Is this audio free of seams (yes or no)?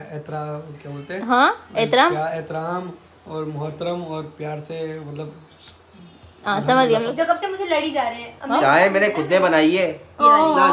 no